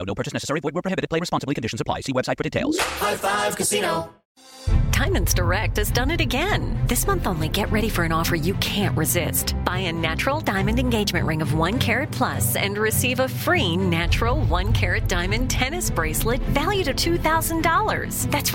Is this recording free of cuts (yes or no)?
no